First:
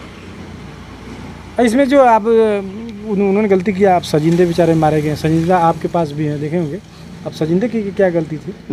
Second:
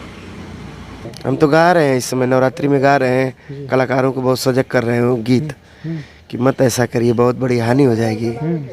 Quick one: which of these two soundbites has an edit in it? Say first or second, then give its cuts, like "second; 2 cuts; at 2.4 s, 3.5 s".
second; 1 cut; at 1.1 s